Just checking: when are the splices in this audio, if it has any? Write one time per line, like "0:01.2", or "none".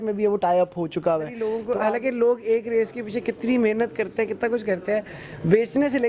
0:01.5